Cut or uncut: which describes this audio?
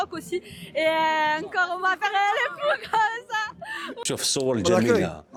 uncut